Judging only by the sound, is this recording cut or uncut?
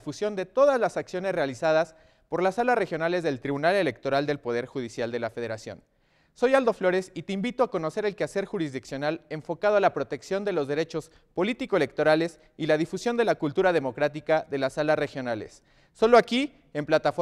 uncut